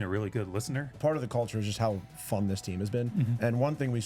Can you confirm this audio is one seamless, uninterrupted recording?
no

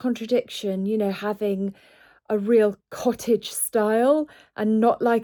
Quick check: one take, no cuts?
yes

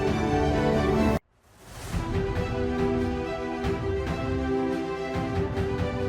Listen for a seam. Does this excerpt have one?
no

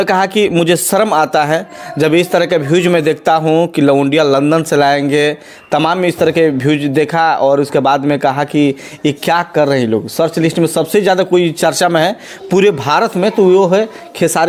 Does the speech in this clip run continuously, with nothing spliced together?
yes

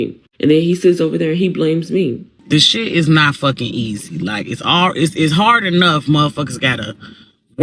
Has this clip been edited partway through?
yes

